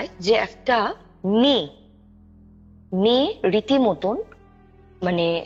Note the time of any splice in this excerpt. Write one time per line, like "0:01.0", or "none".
none